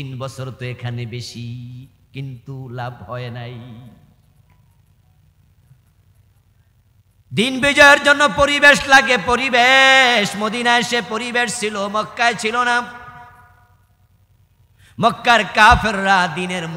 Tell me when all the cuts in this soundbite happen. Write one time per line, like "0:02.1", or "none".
none

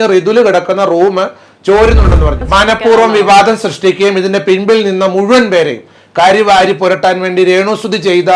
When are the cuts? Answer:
0:02.4

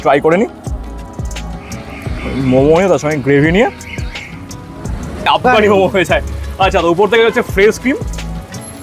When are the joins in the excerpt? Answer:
0:05.2

